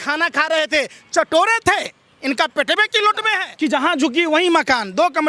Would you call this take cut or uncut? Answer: cut